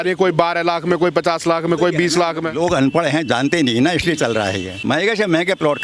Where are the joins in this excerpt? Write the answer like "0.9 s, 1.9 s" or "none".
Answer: 4.7 s